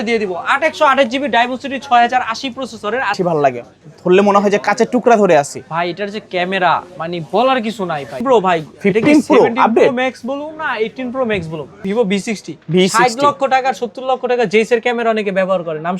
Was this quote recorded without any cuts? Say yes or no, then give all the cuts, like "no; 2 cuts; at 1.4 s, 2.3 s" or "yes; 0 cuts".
no; 3 cuts; at 3.2 s, 8.2 s, 11.8 s